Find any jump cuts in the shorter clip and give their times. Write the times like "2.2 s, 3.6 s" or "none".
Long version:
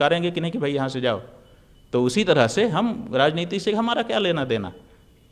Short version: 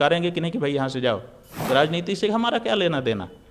1.6 s